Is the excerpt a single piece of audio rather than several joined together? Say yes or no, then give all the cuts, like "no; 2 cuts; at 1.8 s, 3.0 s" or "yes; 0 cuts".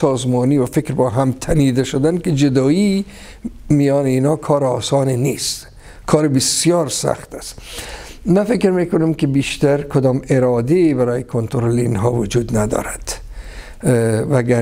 yes; 0 cuts